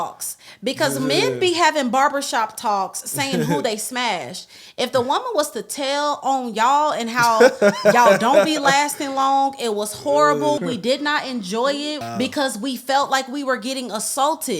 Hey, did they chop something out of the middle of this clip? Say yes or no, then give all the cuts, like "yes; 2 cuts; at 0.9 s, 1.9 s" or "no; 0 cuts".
yes; 2 cuts; at 10.6 s, 12.0 s